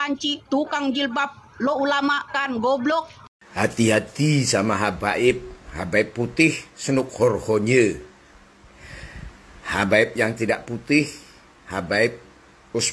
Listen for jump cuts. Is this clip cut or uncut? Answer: cut